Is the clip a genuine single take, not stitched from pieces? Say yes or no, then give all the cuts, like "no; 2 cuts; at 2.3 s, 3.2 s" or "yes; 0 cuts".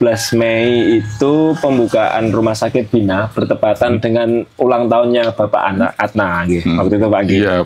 yes; 0 cuts